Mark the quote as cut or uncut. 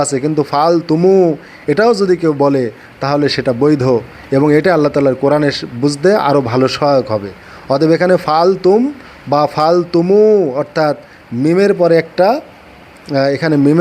uncut